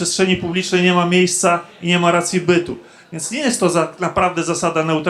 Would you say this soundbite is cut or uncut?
uncut